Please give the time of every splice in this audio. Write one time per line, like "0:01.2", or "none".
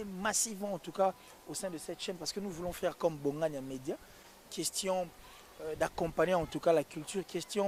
none